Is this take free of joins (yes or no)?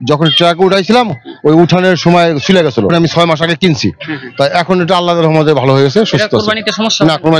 yes